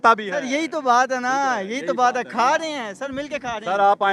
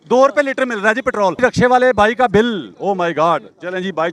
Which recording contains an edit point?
second; 1 cut; at 1.4 s

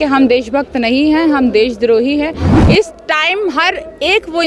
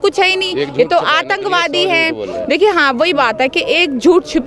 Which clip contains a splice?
first; 1 cut; at 2.5 s

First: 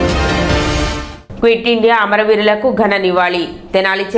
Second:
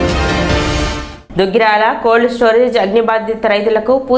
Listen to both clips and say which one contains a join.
second; 1 cut; at 1.1 s

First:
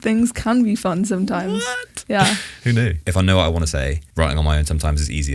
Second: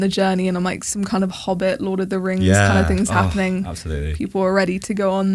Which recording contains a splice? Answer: first; 1 cut; at 3.0 s

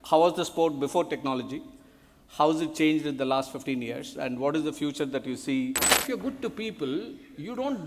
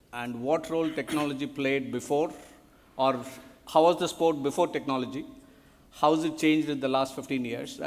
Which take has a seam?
first; 1 cut; at 6.0 s

